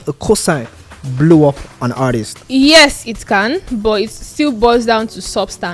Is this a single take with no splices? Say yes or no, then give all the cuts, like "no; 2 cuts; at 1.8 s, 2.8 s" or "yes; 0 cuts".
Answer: no; 1 cut; at 2.3 s